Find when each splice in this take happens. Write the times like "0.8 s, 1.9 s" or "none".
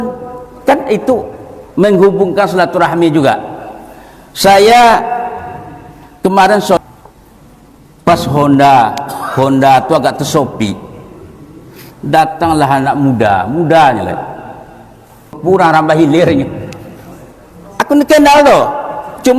6.8 s, 15.4 s